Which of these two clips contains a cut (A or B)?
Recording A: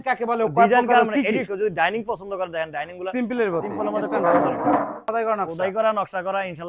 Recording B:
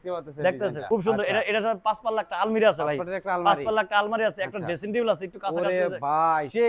A